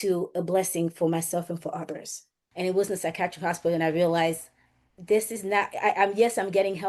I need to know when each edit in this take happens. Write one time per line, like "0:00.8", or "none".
0:02.4